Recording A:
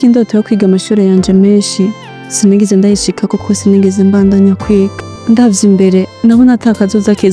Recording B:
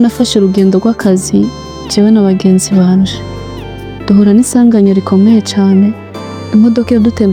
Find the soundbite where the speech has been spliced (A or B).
A